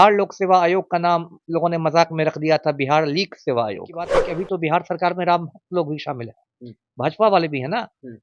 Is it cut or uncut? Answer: cut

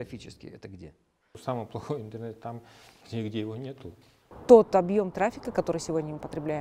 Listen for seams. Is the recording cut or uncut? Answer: cut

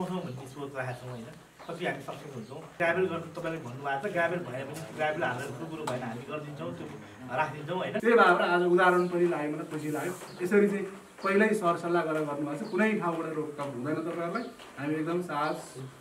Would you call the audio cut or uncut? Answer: cut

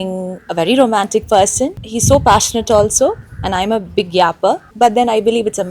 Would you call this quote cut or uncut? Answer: cut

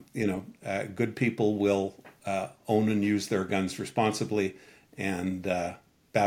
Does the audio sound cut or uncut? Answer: uncut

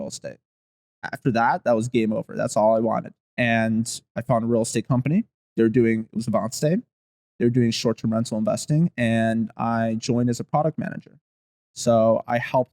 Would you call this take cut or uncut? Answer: cut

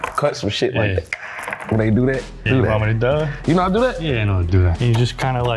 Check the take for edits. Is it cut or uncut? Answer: uncut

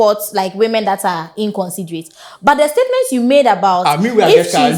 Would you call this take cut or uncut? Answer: uncut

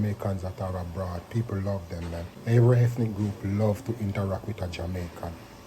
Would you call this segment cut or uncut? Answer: cut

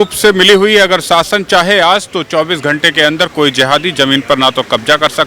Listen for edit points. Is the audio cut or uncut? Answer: uncut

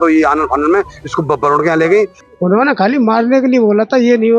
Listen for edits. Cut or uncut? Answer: cut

